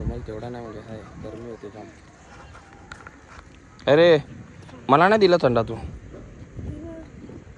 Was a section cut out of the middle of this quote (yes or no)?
no